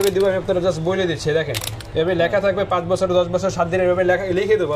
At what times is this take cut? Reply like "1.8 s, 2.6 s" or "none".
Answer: 1.8 s

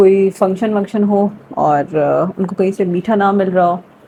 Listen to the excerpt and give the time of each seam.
none

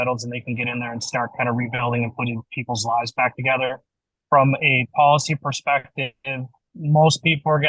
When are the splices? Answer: 6.7 s

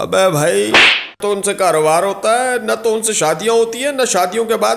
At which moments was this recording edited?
1.0 s

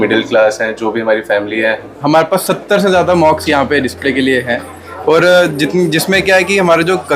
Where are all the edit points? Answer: 2.0 s

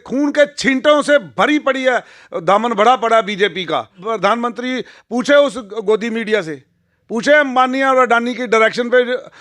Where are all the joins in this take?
4.0 s

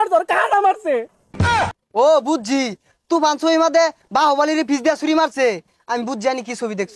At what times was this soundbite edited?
none

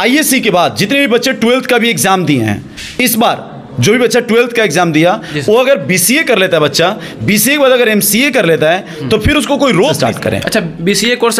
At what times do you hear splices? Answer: 10.0 s

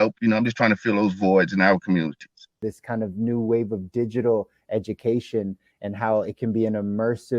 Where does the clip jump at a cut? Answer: 2.6 s

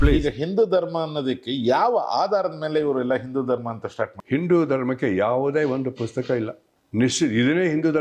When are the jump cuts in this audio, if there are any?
4.2 s

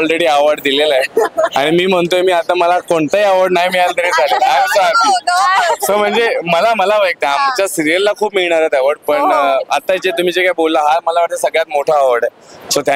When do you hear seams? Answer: none

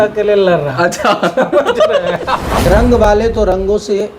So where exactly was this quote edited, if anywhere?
2.5 s

